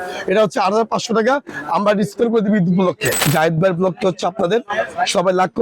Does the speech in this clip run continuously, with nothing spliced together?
no; 1 cut; at 3.2 s

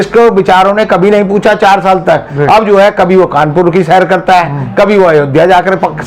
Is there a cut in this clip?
no; 0 cuts

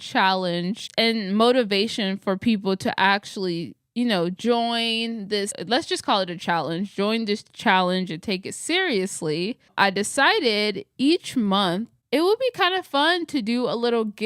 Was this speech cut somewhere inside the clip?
yes; 2 cuts; at 5.6 s, 11.9 s

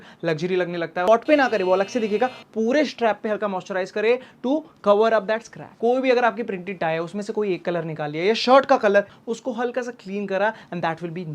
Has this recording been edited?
yes; 3 cuts; at 1.1 s, 5.7 s, 9.1 s

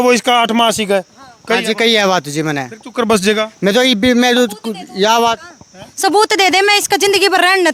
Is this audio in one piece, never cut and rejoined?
yes; 0 cuts

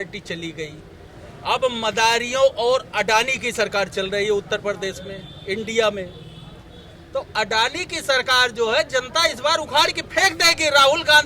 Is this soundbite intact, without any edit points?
yes; 0 cuts

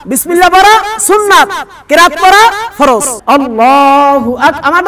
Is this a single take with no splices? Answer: no; 1 cut; at 3.1 s

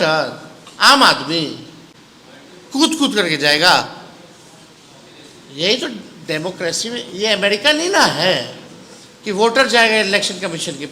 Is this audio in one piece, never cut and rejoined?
yes; 0 cuts

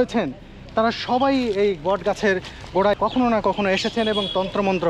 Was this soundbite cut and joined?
yes; 1 cut; at 3.0 s

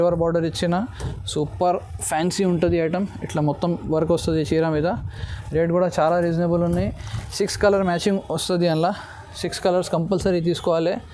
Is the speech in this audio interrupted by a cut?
no; 0 cuts

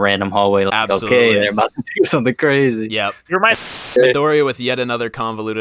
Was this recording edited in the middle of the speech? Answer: yes; 1 cut; at 3.7 s

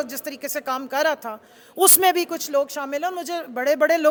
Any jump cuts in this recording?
no; 0 cuts

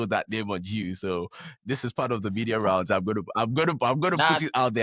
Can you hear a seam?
no; 0 cuts

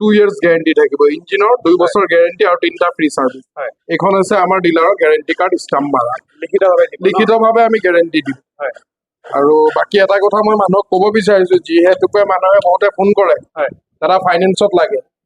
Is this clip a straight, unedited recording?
yes; 0 cuts

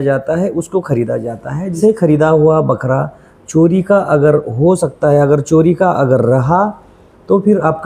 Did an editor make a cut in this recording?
yes; 1 cut; at 1.8 s

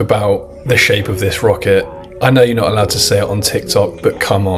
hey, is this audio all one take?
yes; 0 cuts

